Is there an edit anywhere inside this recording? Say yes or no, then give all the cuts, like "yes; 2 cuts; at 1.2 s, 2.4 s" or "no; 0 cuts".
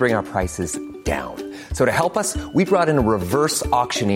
no; 0 cuts